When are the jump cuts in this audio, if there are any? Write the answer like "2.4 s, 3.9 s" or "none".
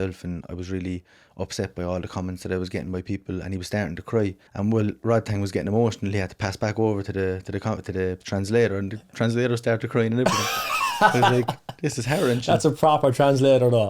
4.4 s